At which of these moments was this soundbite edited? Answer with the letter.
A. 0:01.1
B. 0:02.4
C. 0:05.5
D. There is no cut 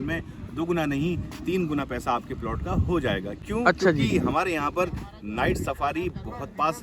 D